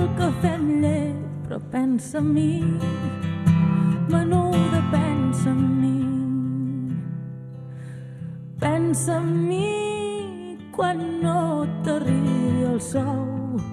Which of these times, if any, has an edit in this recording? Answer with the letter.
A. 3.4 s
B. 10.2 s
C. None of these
B